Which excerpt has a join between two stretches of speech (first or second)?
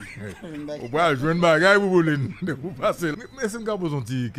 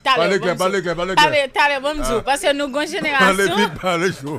first